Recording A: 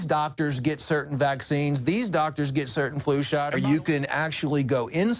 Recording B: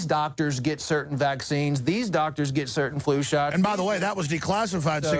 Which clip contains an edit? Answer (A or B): A